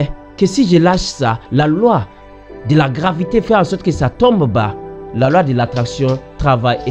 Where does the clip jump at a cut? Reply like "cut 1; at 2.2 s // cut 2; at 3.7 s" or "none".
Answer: none